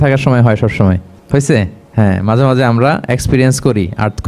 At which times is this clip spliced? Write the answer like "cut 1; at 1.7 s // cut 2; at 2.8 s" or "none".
cut 1; at 1.1 s // cut 2; at 1.8 s